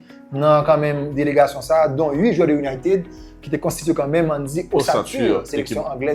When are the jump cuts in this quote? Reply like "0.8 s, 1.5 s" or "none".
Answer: none